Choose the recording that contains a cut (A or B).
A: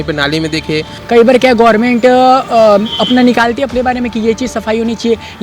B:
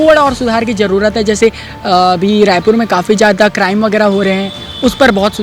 A